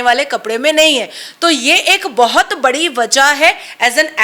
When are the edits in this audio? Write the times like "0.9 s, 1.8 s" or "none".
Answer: none